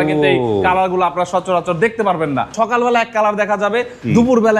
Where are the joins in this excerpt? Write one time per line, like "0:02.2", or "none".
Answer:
0:02.5